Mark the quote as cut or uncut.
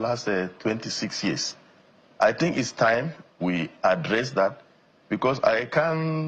uncut